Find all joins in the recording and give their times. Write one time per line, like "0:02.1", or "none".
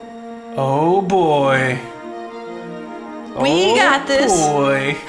none